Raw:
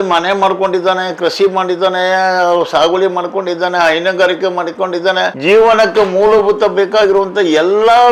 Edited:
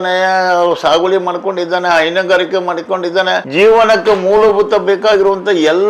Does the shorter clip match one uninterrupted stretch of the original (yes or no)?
yes